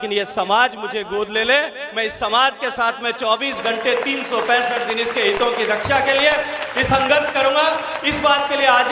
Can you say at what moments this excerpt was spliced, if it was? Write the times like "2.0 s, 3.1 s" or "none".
none